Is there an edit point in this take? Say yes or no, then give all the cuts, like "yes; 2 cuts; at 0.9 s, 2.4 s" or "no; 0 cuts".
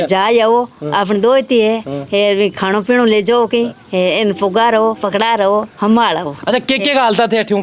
no; 0 cuts